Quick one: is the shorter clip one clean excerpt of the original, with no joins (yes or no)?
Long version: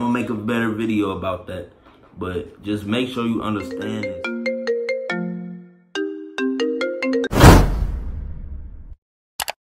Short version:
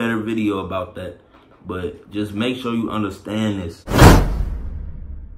no